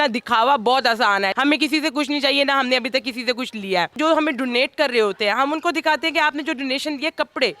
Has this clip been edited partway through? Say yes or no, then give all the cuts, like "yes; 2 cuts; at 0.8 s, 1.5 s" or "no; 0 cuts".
yes; 2 cuts; at 1.3 s, 4.0 s